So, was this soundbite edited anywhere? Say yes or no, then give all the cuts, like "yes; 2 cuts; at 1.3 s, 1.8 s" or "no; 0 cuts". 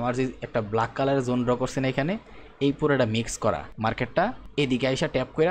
yes; 1 cut; at 4.0 s